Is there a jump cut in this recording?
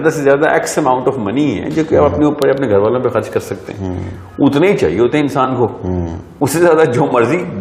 no; 0 cuts

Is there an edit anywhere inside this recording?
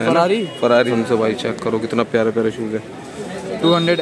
yes; 1 cut; at 0.9 s

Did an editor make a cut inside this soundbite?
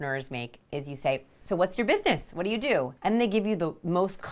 yes; 1 cut; at 2.9 s

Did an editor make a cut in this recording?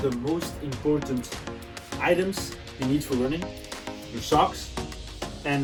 no; 0 cuts

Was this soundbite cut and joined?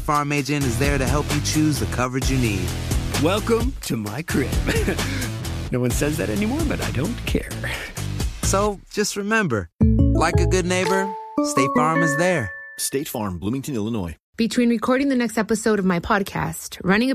yes; 1 cut; at 14.2 s

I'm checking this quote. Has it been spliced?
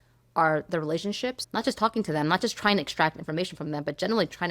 yes; 1 cut; at 1.4 s

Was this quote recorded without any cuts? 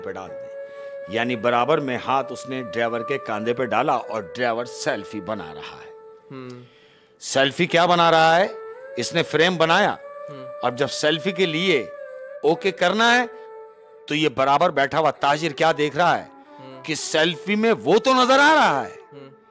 yes; 0 cuts

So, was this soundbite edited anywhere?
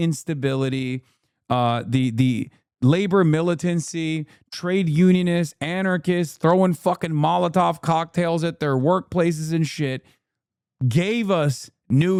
no; 0 cuts

